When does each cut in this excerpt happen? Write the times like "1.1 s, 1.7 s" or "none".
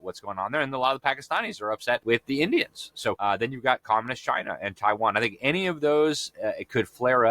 2.0 s, 3.2 s